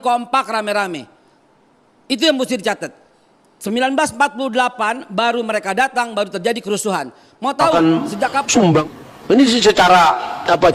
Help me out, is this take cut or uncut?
cut